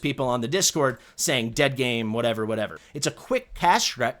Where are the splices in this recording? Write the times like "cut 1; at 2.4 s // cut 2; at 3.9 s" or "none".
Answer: cut 1; at 2.8 s

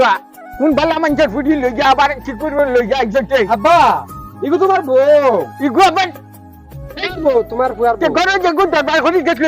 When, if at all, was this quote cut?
none

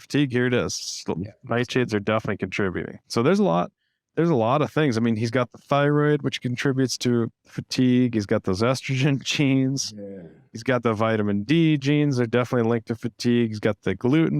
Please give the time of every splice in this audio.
cut 1; at 3.0 s

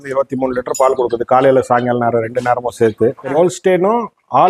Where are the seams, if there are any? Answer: cut 1; at 3.3 s

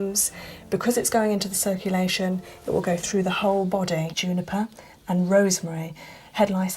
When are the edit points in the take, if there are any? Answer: cut 1; at 4.1 s

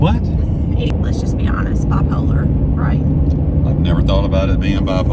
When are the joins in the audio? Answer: cut 1; at 0.9 s

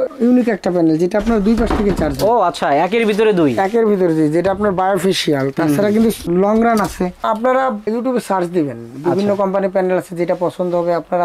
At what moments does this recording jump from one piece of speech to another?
none

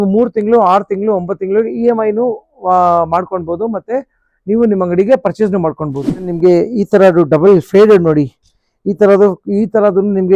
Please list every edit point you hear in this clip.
cut 1; at 6.3 s

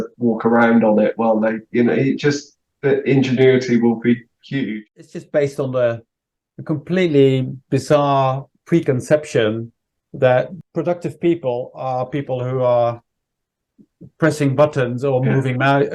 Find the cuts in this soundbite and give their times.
cut 1; at 4.7 s // cut 2; at 10.6 s

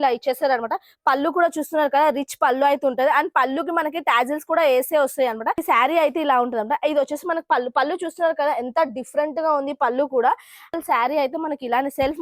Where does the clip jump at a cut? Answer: cut 1; at 5.6 s // cut 2; at 10.8 s

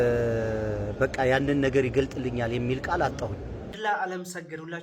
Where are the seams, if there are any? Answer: cut 1; at 3.8 s

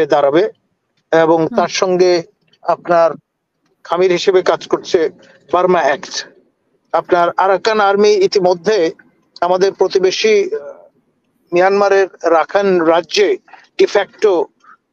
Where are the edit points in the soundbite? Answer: none

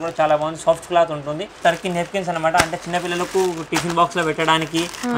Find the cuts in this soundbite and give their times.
cut 1; at 1.6 s

